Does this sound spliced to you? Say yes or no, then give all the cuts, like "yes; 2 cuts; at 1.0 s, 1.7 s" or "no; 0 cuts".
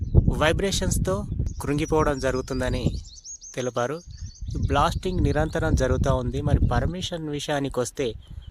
yes; 1 cut; at 1.4 s